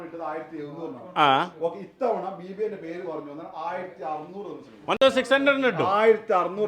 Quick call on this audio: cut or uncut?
uncut